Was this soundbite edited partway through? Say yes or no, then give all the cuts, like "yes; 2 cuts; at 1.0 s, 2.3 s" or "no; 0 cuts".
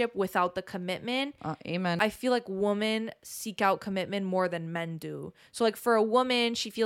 yes; 1 cut; at 2.0 s